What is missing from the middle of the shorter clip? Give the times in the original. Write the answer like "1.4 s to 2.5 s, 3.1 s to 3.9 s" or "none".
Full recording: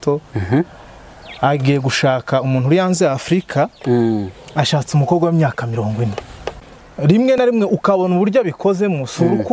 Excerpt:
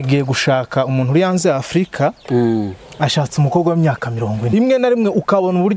6.4 s to 7.4 s

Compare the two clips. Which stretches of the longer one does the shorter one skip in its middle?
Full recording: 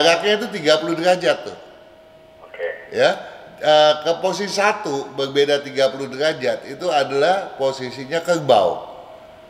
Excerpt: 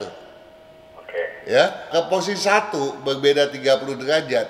3.3 s to 4.0 s

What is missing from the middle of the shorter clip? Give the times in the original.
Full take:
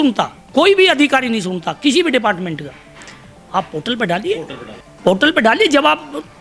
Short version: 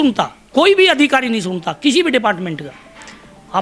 none

